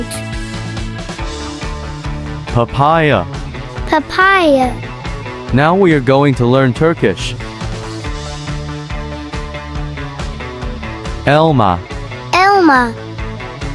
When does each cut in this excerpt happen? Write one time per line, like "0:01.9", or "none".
none